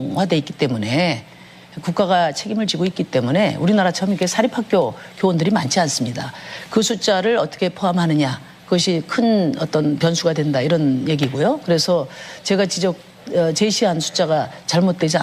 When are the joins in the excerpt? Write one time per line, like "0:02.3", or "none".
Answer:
0:07.2